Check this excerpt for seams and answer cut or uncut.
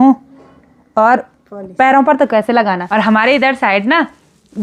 cut